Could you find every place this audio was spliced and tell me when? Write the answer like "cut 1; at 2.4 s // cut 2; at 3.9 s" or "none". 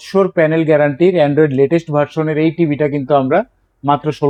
none